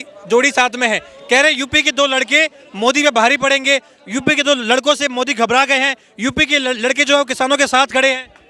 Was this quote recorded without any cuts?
yes; 0 cuts

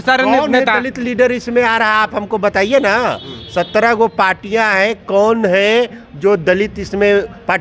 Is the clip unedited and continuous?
yes; 0 cuts

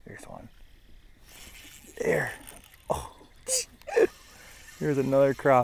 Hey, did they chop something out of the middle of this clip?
no; 0 cuts

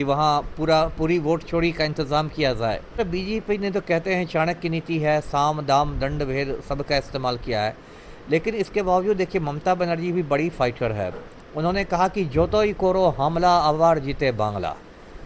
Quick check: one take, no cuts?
no; 1 cut; at 3.0 s

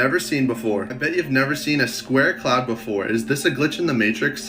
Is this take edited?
yes; 1 cut; at 0.9 s

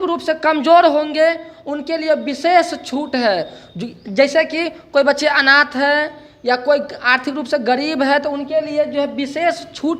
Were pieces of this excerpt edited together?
no; 0 cuts

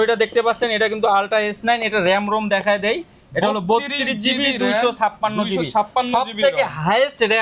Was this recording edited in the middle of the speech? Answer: no; 0 cuts

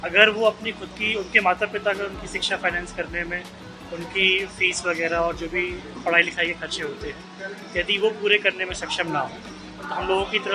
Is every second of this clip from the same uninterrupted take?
yes; 0 cuts

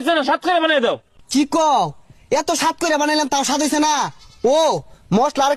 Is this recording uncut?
yes; 0 cuts

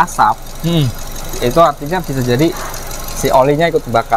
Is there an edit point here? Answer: no; 0 cuts

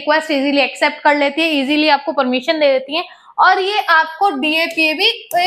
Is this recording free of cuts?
yes; 0 cuts

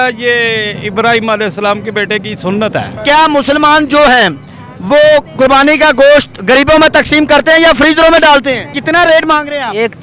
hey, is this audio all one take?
no; 2 cuts; at 3.0 s, 8.7 s

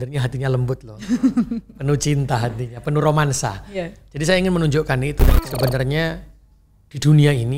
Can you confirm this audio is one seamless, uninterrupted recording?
no; 1 cut; at 5.3 s

